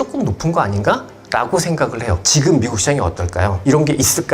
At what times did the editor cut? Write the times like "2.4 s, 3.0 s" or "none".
2.2 s, 3.6 s